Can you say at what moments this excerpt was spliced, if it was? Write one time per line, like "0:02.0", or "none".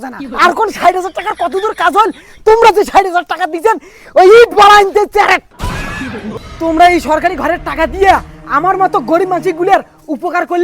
0:06.3